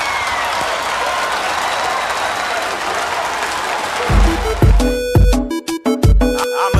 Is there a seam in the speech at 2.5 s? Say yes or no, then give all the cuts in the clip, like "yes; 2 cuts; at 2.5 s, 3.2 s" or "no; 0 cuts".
no; 1 cut; at 4.2 s